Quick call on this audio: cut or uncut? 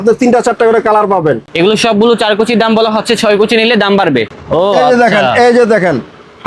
cut